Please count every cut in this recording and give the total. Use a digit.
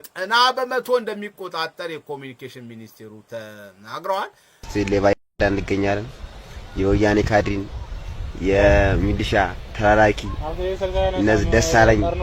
1